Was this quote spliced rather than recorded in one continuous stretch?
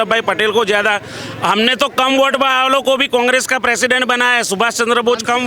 no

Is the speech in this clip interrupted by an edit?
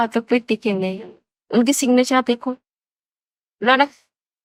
no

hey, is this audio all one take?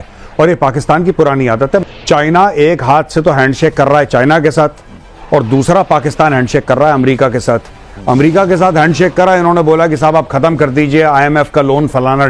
no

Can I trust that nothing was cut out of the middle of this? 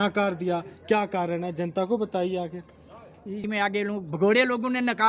no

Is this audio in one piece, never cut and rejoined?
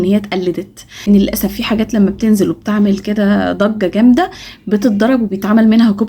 no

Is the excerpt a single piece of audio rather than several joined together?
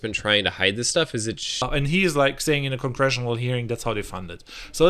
no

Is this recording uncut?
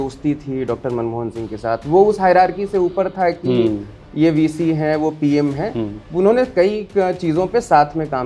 yes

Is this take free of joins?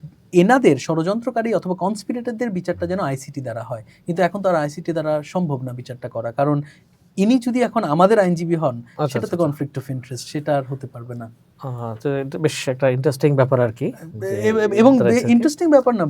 yes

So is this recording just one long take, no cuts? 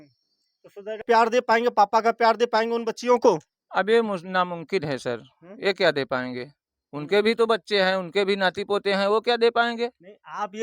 no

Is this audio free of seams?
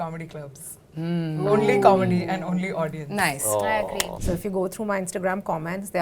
no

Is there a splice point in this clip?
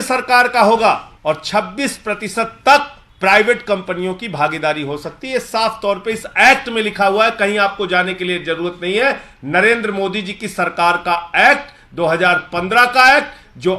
yes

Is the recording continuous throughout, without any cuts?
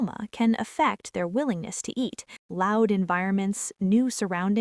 no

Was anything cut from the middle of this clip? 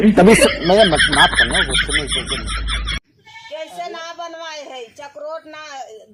no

